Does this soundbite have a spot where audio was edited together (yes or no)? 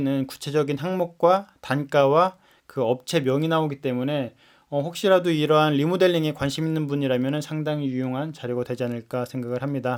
no